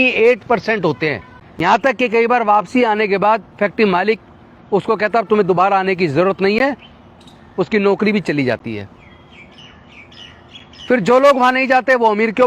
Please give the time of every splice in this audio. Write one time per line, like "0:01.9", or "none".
none